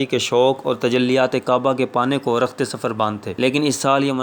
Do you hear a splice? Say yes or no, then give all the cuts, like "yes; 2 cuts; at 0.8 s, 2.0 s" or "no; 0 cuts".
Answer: no; 0 cuts